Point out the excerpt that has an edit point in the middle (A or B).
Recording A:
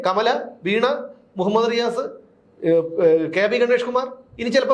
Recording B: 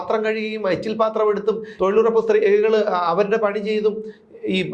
B